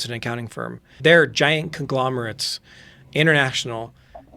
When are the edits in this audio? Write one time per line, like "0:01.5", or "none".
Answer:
0:01.0